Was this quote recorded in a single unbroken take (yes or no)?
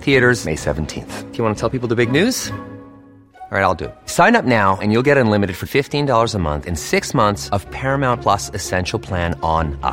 yes